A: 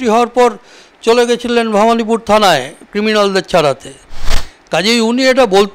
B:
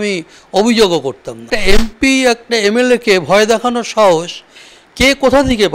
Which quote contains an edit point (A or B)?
B